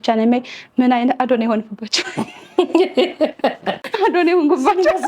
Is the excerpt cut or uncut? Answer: cut